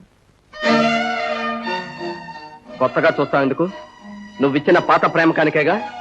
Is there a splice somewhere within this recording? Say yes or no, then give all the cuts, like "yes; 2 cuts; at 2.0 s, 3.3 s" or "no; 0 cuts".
no; 0 cuts